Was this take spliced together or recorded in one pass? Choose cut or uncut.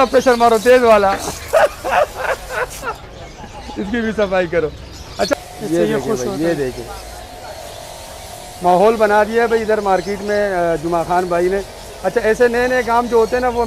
cut